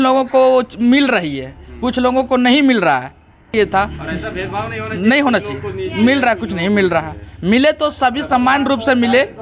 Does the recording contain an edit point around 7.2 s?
no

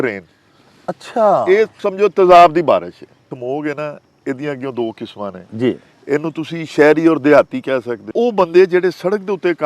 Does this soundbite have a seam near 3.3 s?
yes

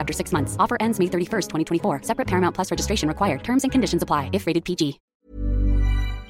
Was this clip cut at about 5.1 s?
yes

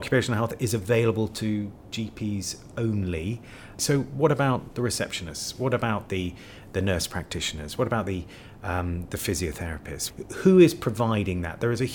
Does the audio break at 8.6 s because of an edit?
no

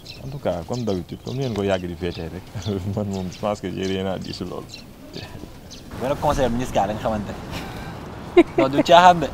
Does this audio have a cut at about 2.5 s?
no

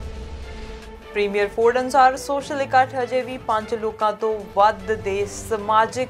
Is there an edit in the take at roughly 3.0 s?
no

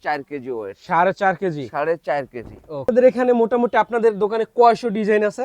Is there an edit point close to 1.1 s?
no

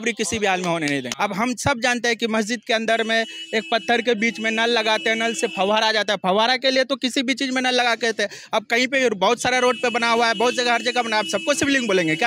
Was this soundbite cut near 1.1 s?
yes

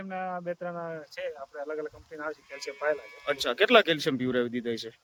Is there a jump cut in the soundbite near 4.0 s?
no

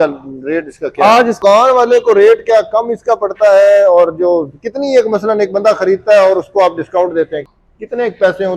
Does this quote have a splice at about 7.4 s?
yes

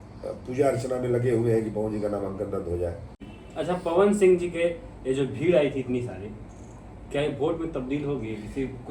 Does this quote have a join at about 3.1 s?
yes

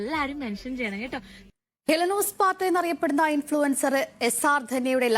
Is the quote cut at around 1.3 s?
yes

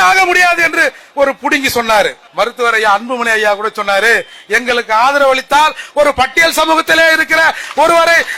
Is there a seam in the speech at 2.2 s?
yes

